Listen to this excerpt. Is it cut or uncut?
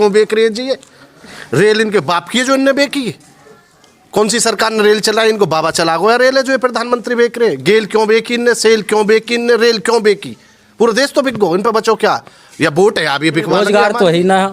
cut